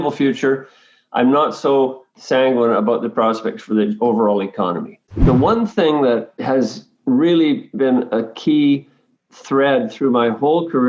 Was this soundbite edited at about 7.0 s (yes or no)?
no